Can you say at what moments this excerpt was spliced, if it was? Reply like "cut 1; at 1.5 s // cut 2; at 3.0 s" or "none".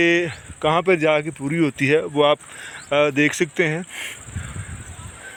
none